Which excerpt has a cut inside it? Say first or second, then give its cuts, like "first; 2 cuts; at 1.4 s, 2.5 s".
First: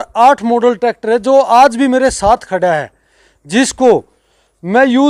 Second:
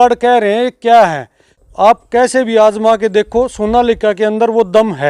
second; 1 cut; at 1.6 s